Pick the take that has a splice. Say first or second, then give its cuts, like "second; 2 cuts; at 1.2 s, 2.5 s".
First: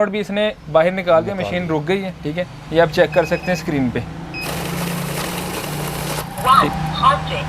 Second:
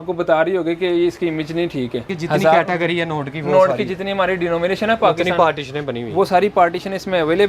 second; 1 cut; at 2.1 s